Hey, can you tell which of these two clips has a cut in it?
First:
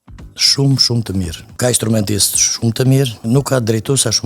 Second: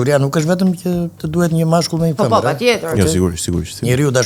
first; 2 cuts; at 1.4 s, 3.2 s

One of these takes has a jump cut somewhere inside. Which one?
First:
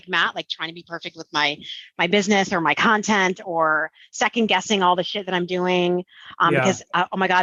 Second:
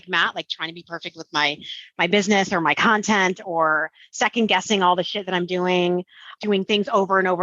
second; 1 cut; at 6.4 s

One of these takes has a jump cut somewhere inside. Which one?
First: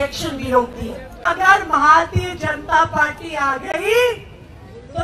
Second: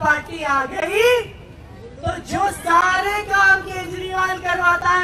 first; 1 cut; at 1.2 s

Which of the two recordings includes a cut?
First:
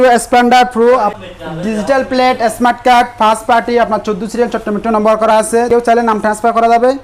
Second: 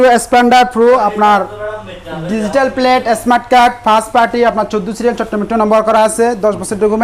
first; 2 cuts; at 1.1 s, 5.7 s

